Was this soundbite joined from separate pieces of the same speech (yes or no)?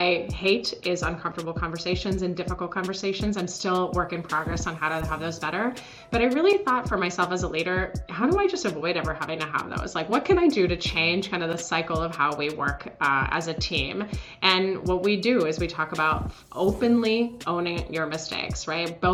no